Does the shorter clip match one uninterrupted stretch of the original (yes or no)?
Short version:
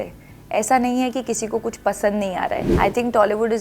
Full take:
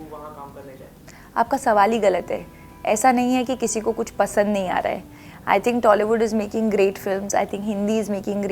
no